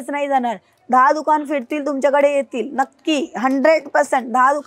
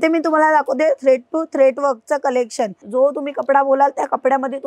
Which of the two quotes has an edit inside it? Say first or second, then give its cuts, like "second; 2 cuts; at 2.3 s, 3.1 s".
second; 1 cut; at 2.8 s